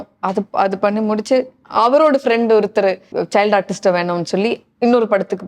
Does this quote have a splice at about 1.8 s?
no; 1 cut; at 3.1 s

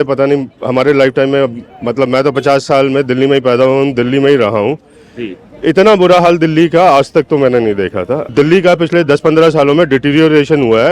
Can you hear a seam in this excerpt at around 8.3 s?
yes; 1 cut; at 8.3 s

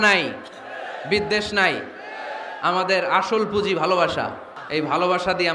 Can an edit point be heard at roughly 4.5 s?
yes; 1 cut; at 4.5 s

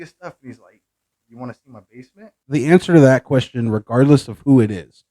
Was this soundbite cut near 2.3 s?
yes; 1 cut; at 2.3 s

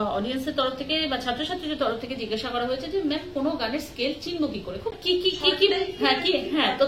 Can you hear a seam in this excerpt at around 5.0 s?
yes; 1 cut; at 5.0 s

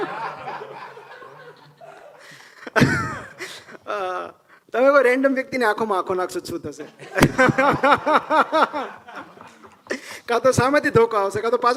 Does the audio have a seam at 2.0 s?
no; 0 cuts

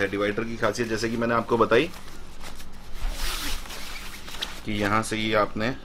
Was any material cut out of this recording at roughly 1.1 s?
no; 0 cuts

